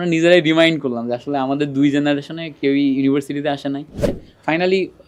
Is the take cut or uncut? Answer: cut